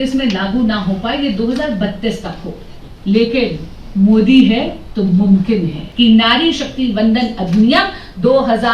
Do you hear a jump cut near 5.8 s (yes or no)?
yes